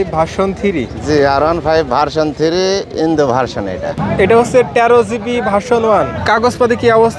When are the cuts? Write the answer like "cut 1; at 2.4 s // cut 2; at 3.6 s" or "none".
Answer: cut 1; at 3.9 s // cut 2; at 6.2 s

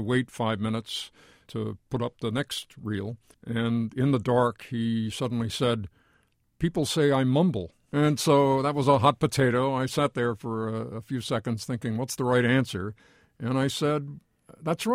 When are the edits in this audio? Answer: cut 1; at 1.5 s // cut 2; at 3.3 s // cut 3; at 7.7 s

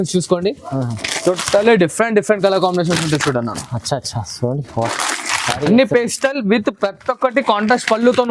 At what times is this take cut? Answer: none

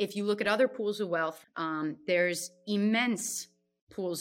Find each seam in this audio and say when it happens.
cut 1; at 1.4 s

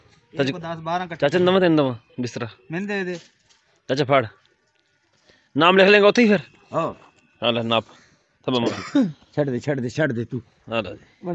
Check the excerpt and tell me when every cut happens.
none

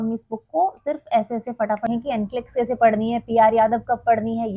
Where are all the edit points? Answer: cut 1; at 1.9 s

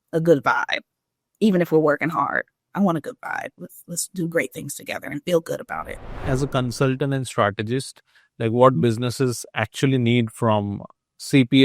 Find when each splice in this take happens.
cut 1; at 6.2 s

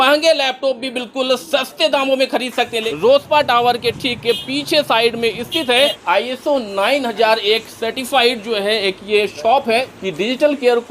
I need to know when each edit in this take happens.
cut 1; at 2.8 s // cut 2; at 6.0 s // cut 3; at 9.9 s

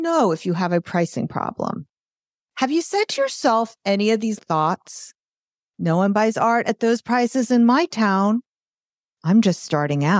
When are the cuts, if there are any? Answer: cut 1; at 4.4 s

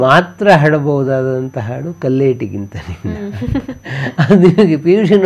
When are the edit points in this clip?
none

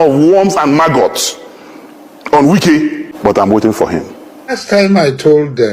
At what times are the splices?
cut 1; at 3.1 s // cut 2; at 4.6 s

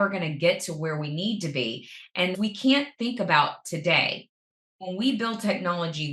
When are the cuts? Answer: cut 1; at 2.3 s // cut 2; at 4.7 s

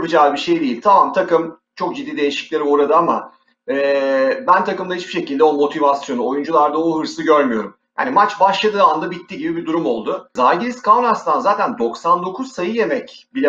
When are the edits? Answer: cut 1; at 10.3 s

